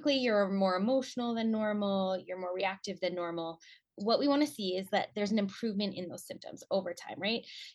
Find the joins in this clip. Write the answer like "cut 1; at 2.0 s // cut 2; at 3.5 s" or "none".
cut 1; at 3.9 s